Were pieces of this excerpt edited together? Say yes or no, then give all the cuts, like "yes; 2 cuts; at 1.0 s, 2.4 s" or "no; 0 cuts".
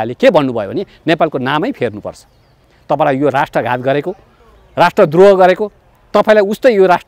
no; 0 cuts